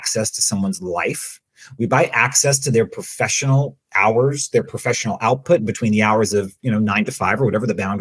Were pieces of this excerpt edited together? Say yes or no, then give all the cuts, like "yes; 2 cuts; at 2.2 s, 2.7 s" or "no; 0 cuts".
no; 0 cuts